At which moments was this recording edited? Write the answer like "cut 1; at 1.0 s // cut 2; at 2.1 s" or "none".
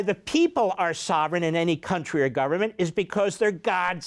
none